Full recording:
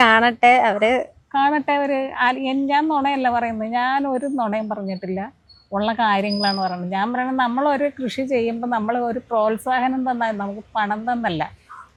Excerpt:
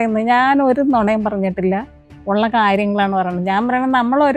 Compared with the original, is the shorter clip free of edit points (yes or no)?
yes